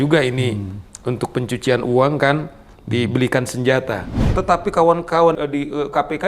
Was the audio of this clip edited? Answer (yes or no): yes